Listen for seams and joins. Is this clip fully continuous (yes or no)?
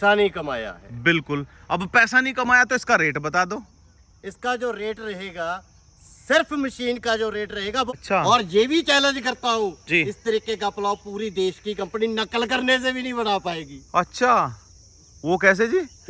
no